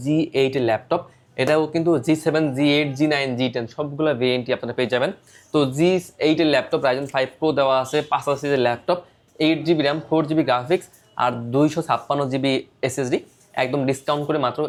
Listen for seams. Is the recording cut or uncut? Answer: uncut